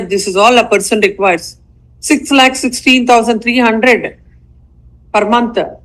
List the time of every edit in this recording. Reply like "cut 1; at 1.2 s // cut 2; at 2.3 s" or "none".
none